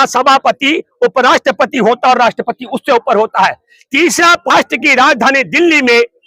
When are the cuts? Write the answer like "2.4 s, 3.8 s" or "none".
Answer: 4.5 s